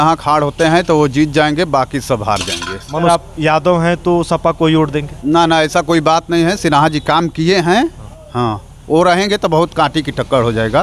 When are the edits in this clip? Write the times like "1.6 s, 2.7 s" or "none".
3.1 s